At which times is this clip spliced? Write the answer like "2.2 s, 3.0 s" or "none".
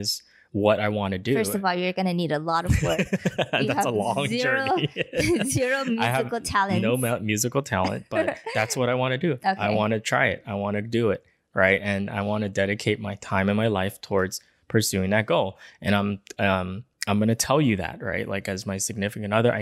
none